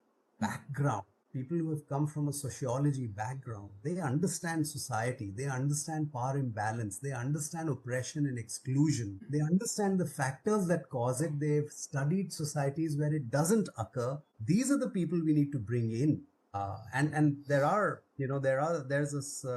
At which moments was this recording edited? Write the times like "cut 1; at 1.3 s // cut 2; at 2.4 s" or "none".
none